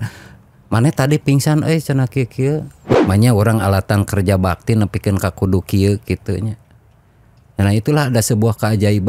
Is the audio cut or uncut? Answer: cut